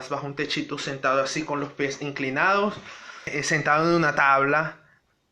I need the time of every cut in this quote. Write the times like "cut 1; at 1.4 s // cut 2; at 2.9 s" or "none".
cut 1; at 3.3 s